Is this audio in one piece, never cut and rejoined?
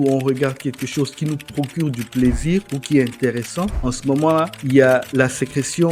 yes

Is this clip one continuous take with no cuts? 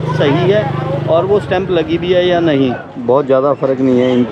no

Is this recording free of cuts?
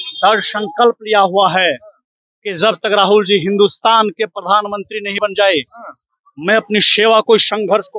yes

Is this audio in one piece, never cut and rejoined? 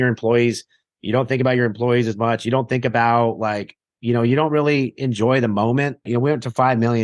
no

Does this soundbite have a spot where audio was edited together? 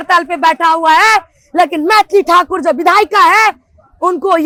no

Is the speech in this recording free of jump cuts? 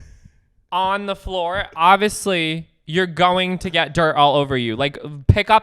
yes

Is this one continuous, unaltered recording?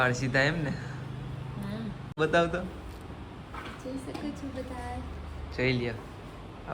no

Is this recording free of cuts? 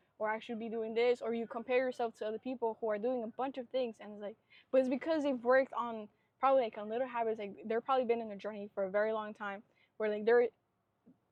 yes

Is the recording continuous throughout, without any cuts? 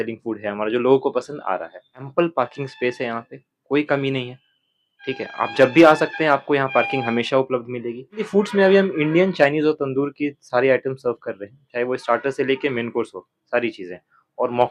no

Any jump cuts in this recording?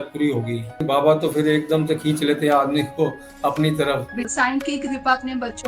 yes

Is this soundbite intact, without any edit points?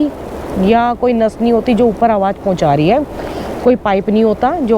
yes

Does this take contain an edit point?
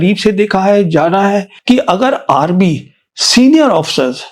yes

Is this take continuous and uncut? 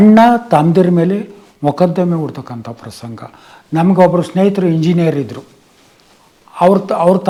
yes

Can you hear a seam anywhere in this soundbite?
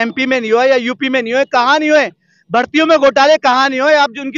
no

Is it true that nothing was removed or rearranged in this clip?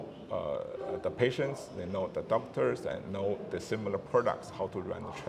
yes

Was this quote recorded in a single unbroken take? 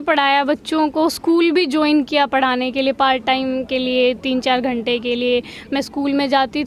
yes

